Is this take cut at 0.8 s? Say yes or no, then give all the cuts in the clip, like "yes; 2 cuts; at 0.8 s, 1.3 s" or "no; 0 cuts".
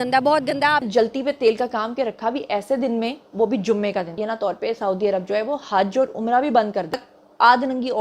yes; 3 cuts; at 0.8 s, 4.2 s, 7.0 s